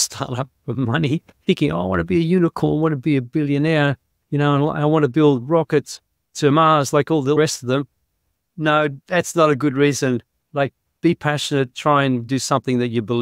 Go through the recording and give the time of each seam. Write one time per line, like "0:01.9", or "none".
0:07.4